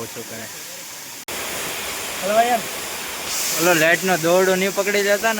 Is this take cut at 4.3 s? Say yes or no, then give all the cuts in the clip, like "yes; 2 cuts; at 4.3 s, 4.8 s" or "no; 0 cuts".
no; 1 cut; at 1.3 s